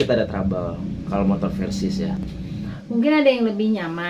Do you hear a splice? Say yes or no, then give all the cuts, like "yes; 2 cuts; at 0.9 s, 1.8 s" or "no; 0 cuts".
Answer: yes; 1 cut; at 2.7 s